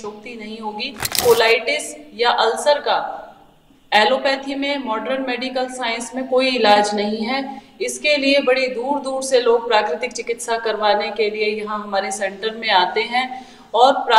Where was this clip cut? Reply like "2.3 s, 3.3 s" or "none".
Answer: 1.2 s